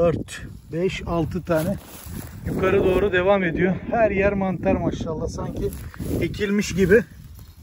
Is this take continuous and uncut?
yes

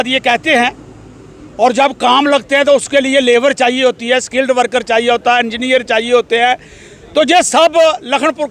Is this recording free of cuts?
yes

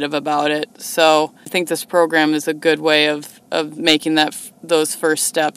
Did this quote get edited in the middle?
yes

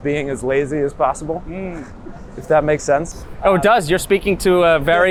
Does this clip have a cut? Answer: no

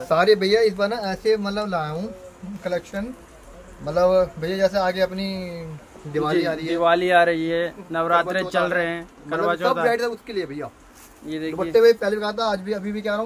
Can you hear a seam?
no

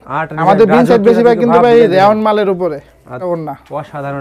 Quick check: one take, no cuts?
no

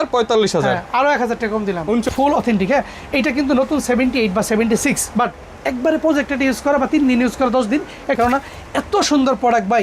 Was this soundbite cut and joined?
yes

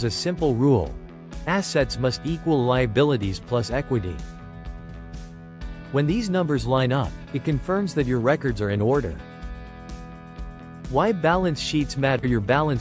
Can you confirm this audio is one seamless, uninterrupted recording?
yes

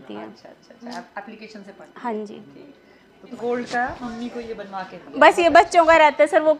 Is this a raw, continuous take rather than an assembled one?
no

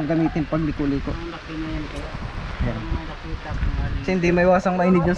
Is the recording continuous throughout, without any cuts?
yes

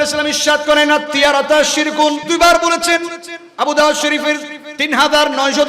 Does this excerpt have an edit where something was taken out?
yes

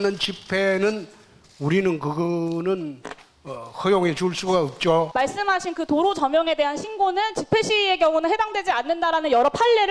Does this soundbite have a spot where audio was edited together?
yes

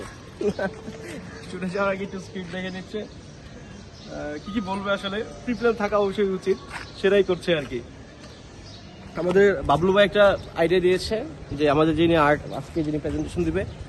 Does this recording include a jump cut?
no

